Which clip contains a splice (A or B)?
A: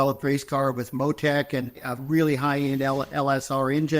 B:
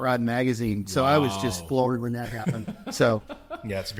A